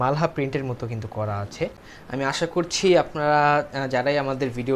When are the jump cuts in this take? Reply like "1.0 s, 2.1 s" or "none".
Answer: 1.9 s